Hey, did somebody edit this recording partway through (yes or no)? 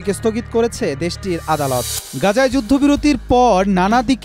yes